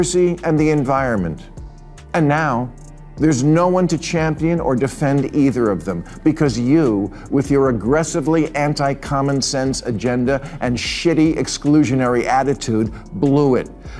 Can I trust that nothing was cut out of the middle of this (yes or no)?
yes